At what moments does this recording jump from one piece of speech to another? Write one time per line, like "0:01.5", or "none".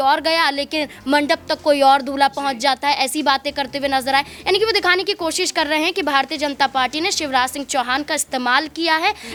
none